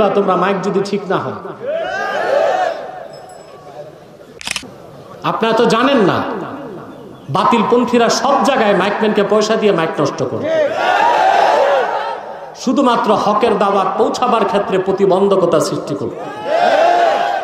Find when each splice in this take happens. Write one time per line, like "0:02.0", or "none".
0:04.5